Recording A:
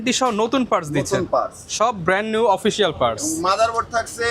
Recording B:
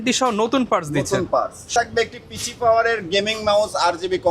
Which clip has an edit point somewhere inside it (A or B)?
B